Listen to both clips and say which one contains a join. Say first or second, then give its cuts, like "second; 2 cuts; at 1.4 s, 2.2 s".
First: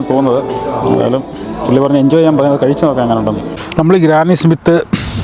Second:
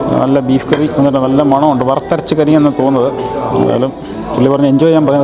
first; 1 cut; at 3.6 s